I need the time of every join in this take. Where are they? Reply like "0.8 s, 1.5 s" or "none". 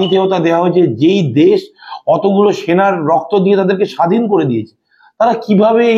none